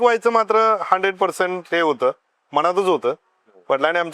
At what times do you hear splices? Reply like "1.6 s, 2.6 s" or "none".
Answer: none